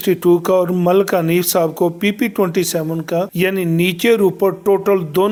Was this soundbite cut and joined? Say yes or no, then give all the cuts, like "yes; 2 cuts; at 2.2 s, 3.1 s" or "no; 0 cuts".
no; 0 cuts